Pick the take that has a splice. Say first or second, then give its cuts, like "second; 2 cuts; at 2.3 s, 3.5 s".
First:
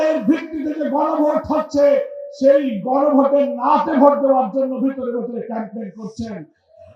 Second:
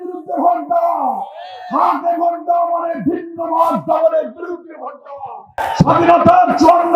second; 1 cut; at 5.5 s